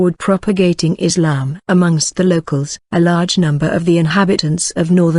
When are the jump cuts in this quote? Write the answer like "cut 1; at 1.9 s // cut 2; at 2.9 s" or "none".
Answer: cut 1; at 2.3 s